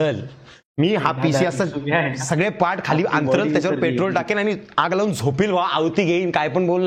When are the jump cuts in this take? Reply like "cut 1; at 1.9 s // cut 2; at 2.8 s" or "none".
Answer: none